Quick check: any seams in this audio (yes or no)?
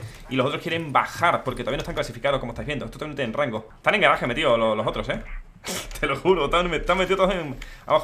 yes